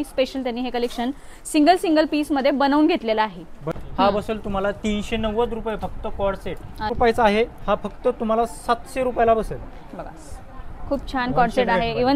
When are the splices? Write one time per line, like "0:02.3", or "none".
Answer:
0:03.7
0:06.9